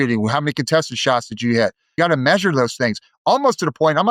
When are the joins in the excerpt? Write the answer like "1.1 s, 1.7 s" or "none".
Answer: 1.9 s